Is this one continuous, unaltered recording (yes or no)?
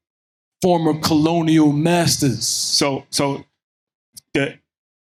yes